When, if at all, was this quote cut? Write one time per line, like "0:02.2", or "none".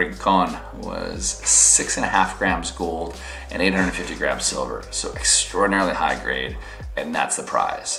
none